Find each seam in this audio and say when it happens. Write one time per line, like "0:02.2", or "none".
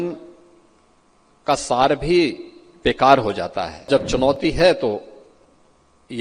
0:03.9